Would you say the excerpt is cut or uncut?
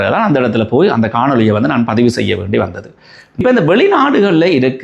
cut